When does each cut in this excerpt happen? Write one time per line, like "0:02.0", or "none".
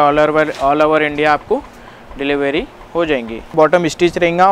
0:03.5

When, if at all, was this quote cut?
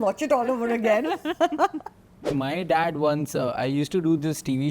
0:02.1

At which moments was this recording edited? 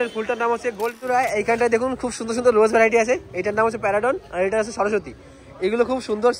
0:01.1

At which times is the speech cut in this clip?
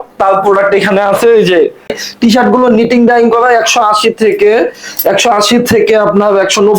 0:02.0

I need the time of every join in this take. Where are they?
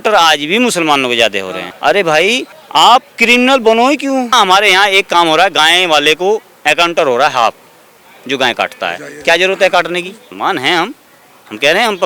0:01.6
0:02.5
0:04.3
0:10.2

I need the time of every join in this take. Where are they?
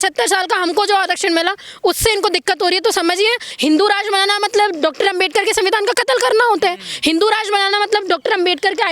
0:03.5

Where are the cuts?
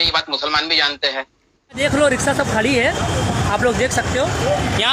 0:01.8

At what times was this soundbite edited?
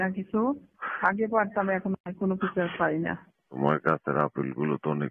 0:03.5

